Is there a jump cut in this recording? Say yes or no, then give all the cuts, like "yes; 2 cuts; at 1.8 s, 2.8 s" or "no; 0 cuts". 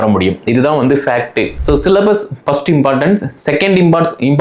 yes; 1 cut; at 1.5 s